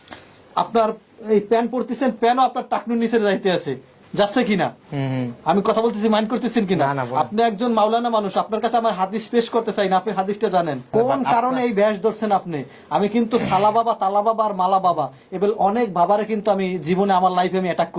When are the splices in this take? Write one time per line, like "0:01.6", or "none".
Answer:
0:10.9